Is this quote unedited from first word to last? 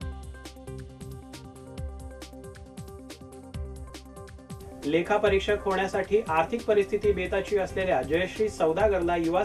no; 1 cut; at 3.0 s

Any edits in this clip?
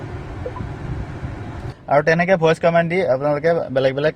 yes; 1 cut; at 1.8 s

